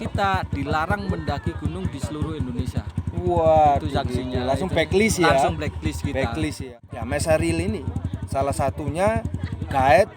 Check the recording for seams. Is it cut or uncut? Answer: cut